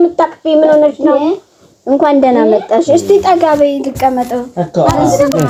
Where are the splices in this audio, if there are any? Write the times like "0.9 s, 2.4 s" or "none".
none